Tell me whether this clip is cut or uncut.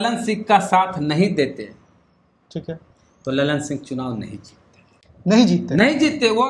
uncut